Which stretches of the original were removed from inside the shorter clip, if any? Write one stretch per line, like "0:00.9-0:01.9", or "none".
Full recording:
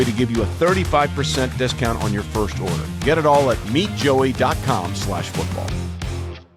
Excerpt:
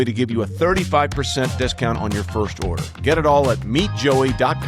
none